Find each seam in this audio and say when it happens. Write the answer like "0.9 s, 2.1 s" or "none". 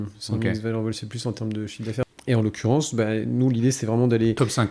2.0 s